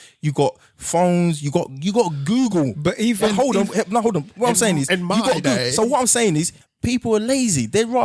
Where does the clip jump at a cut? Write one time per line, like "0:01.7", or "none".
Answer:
0:06.6